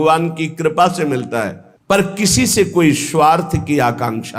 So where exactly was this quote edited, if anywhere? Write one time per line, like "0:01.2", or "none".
0:01.6